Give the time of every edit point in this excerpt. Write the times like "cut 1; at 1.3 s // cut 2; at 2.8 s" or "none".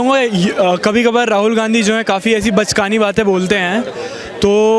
none